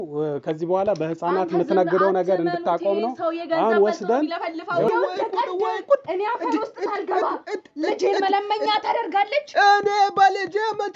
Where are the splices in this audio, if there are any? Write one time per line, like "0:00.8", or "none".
0:04.9